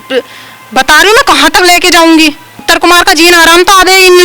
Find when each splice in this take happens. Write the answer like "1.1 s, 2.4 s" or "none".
2.5 s